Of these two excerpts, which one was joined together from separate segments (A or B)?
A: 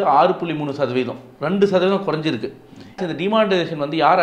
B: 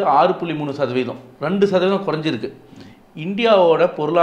A